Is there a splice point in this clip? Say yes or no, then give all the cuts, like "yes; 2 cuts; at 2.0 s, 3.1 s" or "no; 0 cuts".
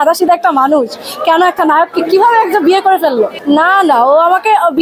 yes; 1 cut; at 3.4 s